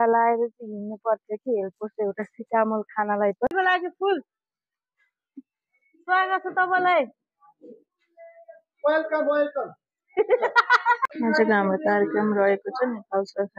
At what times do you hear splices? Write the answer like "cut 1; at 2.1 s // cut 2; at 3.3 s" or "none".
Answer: cut 1; at 3.5 s // cut 2; at 11.1 s